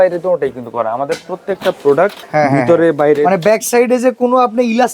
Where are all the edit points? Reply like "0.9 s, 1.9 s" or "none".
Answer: 2.2 s